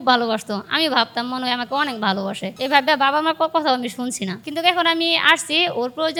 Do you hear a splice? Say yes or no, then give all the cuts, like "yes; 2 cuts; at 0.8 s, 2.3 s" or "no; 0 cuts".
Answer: no; 0 cuts